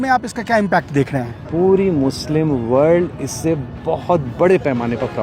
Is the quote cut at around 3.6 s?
no; 1 cut; at 1.4 s

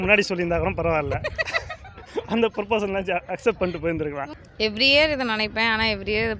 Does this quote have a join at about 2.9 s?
no; 1 cut; at 4.2 s

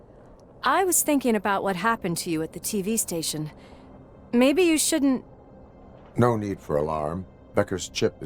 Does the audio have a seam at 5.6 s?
no; 0 cuts

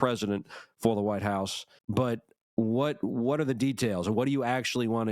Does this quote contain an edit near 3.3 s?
no; 1 cut; at 1.8 s

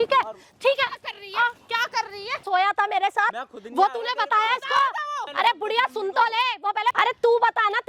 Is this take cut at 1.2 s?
no; 3 cuts; at 2.4 s, 5.2 s, 6.9 s

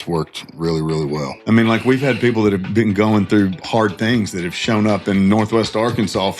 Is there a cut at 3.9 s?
no; 1 cut; at 1.3 s

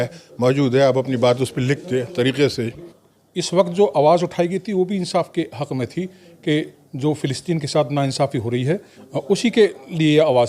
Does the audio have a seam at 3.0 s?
yes; 1 cut; at 3.0 s

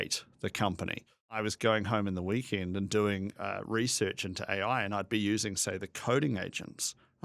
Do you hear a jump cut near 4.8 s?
no; 2 cuts; at 1.5 s, 3.5 s

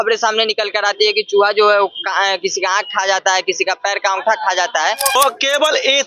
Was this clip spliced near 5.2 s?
yes; 1 cut; at 5.2 s

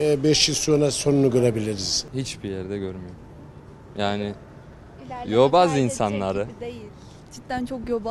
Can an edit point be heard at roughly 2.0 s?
yes; 1 cut; at 2.0 s

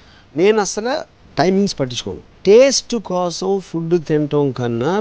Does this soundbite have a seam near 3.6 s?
no; 1 cut; at 2.3 s

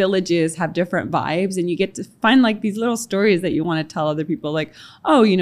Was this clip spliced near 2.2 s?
yes; 1 cut; at 2.2 s

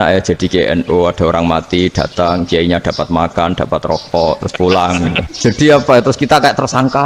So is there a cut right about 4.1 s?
no; 1 cut; at 5.3 s

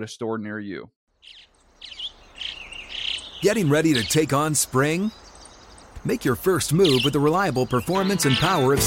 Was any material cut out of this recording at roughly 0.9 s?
yes; 1 cut; at 0.9 s

